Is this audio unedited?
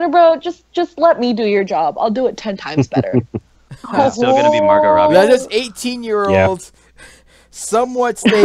yes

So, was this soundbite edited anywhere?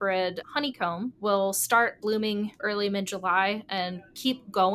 yes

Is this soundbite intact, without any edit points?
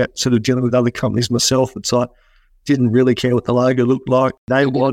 yes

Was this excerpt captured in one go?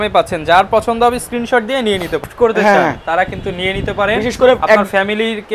no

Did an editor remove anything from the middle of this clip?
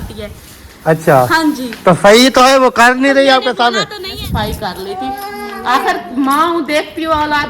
yes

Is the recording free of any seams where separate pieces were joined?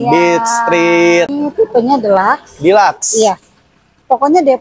no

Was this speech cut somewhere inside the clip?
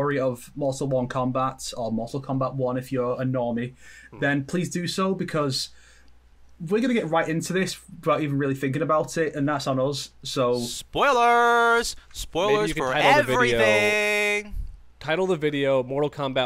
no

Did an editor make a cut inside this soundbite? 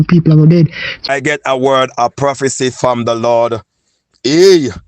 yes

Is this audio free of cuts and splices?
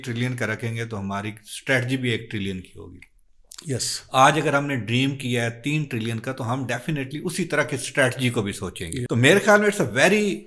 no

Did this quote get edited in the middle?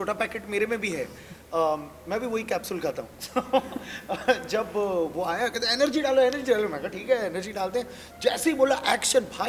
no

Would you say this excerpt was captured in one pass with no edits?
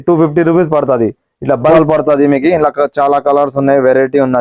no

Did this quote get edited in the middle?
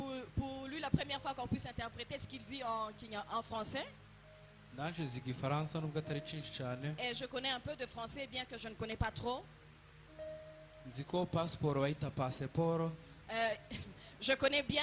no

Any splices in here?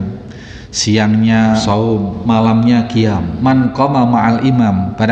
yes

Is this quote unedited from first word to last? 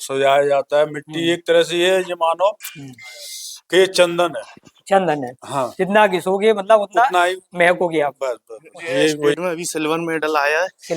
no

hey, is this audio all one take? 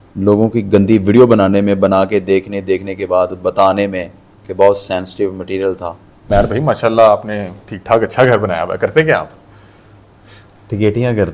no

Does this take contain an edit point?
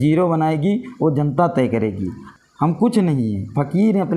yes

